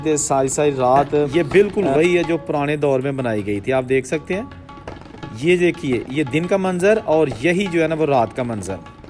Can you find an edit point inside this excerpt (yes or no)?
yes